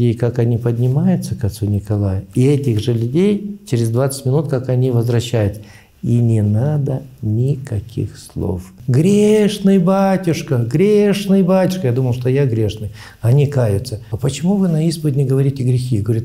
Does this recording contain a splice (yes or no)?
yes